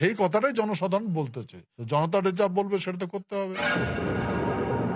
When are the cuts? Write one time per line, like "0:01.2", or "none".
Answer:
0:03.5